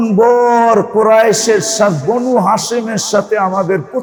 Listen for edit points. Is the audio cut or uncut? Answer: uncut